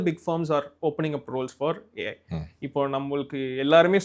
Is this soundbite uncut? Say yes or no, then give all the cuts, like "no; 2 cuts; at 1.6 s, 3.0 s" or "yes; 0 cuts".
yes; 0 cuts